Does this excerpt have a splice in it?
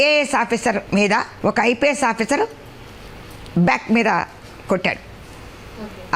yes; 1 cut; at 1.0 s

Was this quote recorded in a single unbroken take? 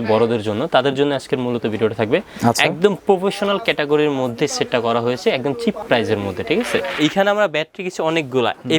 no; 2 cuts; at 5.8 s, 6.9 s

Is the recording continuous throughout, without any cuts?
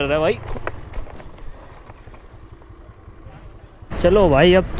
no; 1 cut; at 3.8 s

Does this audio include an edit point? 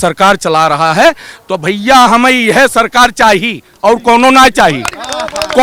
no; 0 cuts

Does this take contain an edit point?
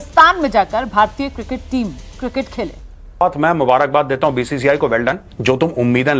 yes; 2 cuts; at 3.2 s, 5.3 s

